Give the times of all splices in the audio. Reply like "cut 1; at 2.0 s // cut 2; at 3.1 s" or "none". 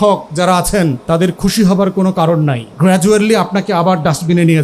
cut 1; at 1.0 s // cut 2; at 2.6 s

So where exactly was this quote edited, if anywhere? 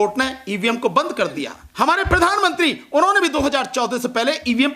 cut 1; at 1.6 s

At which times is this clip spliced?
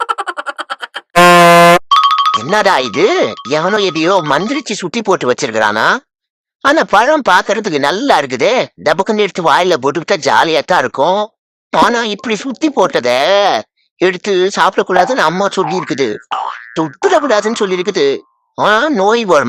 cut 1; at 1.8 s

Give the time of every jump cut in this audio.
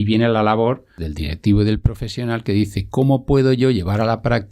cut 1; at 1.0 s

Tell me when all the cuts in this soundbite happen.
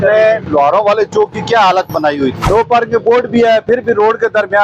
cut 1; at 2.4 s

